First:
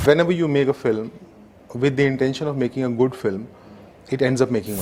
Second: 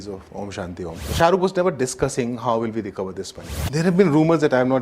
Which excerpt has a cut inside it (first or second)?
second